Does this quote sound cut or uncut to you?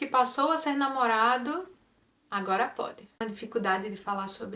cut